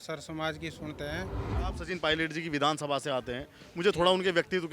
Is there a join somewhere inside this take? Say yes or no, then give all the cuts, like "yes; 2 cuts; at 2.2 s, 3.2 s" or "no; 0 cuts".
yes; 1 cut; at 1.6 s